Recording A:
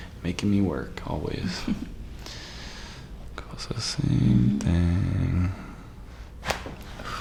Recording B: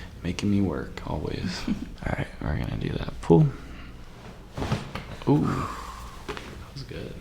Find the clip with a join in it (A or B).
B